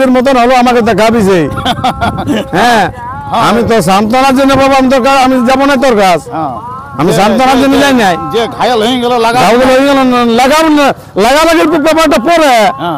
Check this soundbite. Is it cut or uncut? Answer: uncut